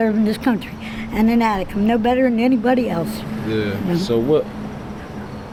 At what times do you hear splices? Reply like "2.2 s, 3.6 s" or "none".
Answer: none